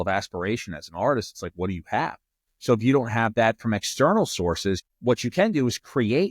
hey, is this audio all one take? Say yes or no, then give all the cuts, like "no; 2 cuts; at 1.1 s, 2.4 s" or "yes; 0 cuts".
no; 1 cut; at 4.8 s